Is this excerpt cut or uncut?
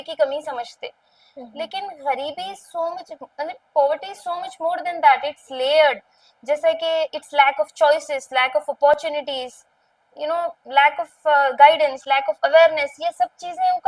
uncut